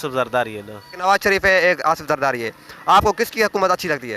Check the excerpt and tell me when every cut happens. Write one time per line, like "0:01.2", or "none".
0:00.9